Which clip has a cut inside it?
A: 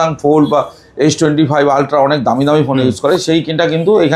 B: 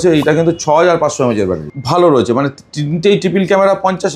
B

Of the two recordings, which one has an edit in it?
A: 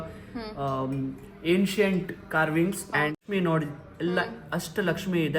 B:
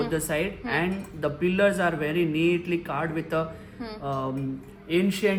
A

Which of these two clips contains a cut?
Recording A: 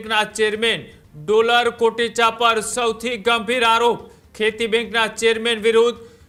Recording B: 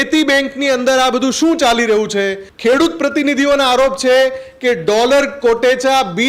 B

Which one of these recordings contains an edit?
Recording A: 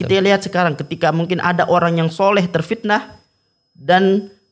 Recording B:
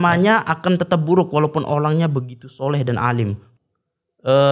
B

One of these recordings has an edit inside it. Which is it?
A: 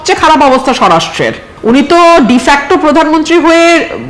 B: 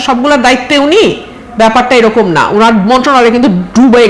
A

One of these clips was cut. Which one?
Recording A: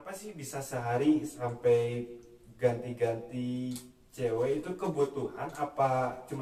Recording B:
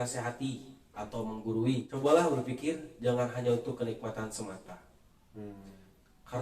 B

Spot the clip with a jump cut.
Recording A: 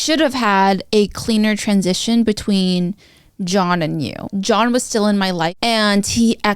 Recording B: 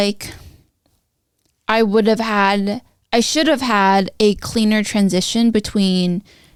A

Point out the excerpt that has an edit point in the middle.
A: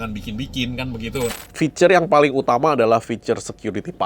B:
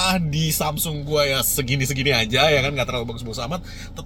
A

